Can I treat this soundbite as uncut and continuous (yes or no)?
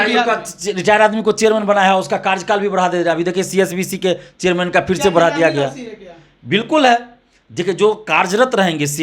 yes